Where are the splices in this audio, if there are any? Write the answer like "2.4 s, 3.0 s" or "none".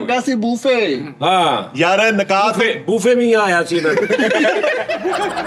none

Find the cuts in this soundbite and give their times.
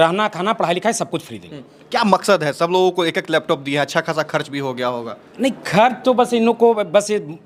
none

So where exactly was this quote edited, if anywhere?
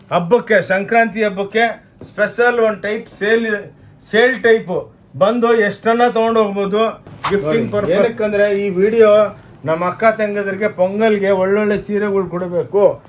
7.8 s

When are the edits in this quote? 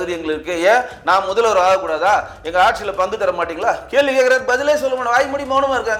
none

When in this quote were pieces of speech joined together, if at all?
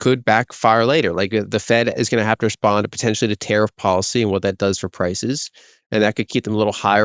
none

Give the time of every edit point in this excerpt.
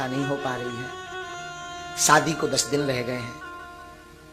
1.3 s

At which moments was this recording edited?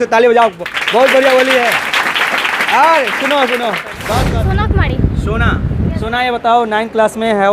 4.0 s

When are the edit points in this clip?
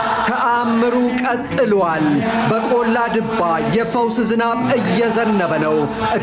none

